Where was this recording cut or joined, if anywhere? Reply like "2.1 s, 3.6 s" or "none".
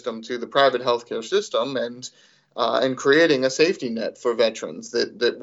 none